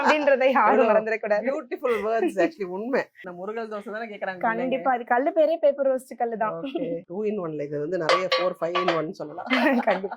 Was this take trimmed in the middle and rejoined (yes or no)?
yes